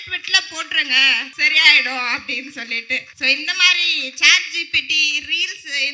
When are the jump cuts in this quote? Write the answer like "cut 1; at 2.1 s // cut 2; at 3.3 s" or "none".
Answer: cut 1; at 1.3 s // cut 2; at 3.1 s